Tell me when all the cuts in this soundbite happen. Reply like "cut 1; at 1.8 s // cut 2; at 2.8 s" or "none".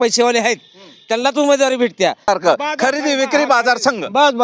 cut 1; at 2.3 s